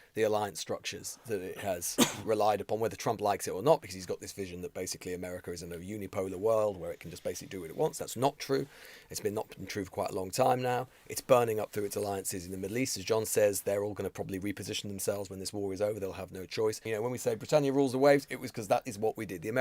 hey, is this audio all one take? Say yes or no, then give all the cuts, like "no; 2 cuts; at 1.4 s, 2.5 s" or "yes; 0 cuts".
no; 1 cut; at 16.9 s